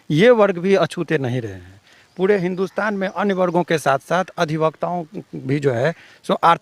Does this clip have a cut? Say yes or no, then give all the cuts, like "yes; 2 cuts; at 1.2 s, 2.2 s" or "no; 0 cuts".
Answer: no; 0 cuts